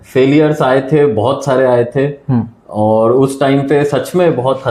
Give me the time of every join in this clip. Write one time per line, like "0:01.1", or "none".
none